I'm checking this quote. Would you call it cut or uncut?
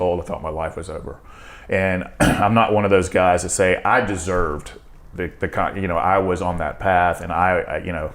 uncut